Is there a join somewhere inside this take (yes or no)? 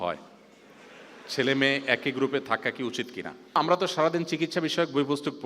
yes